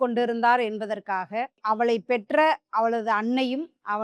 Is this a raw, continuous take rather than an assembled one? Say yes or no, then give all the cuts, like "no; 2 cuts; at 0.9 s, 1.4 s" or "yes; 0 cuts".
yes; 0 cuts